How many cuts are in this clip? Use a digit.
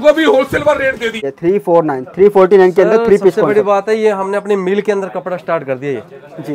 1